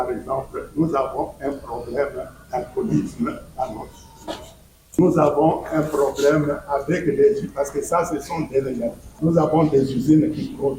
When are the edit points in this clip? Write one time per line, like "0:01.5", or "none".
0:05.0
0:09.0

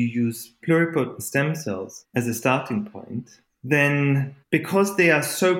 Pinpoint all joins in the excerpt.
0:02.0
0:04.3

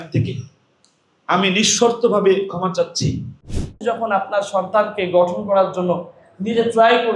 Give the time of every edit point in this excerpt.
0:03.7

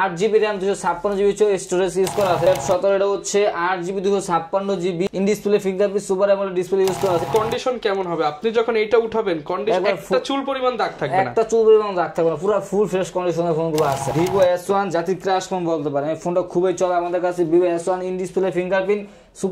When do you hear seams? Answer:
0:02.5
0:05.1
0:07.3
0:14.1

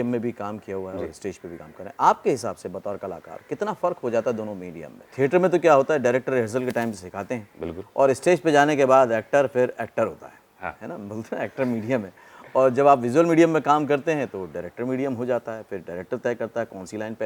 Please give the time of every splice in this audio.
0:05.1

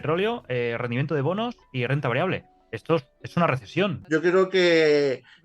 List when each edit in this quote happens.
0:04.0

